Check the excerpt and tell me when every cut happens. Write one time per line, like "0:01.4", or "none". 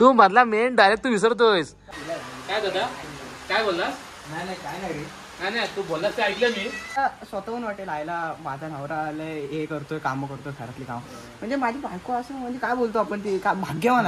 0:01.8
0:07.0